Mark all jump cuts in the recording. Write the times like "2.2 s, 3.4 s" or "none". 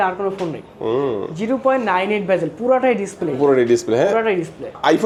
none